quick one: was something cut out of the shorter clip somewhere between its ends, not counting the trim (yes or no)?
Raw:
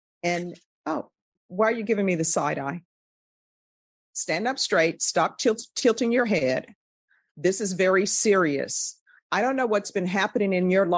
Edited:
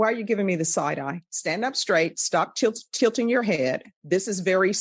yes